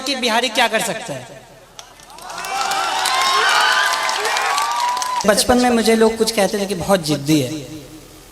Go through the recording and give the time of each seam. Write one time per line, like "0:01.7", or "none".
0:05.2